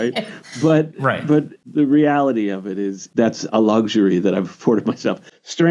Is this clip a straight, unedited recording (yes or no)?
no